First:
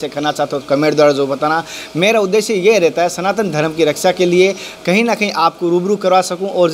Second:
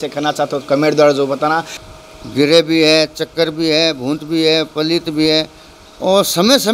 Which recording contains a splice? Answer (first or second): second